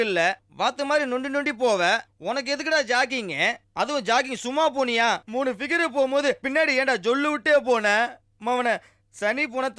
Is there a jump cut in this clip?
no; 0 cuts

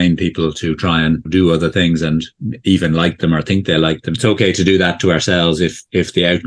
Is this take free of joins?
no; 2 cuts; at 1.2 s, 4.1 s

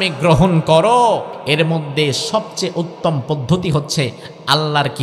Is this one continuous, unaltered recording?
no; 1 cut; at 1.3 s

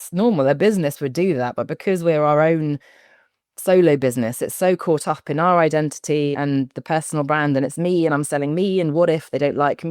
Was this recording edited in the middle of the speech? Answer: yes; 1 cut; at 6.3 s

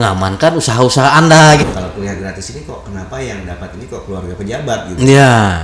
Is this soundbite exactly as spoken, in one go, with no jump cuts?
no; 1 cut; at 1.6 s

